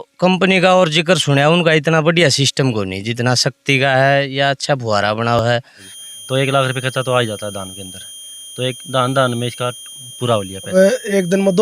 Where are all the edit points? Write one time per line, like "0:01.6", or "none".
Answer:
0:02.5
0:05.5
0:10.7